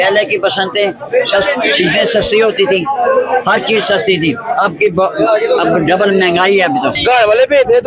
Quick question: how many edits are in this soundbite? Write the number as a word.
one